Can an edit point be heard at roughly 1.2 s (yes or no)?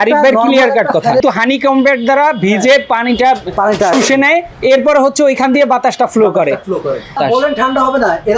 yes